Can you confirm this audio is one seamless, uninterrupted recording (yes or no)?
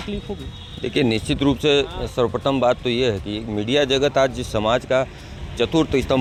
yes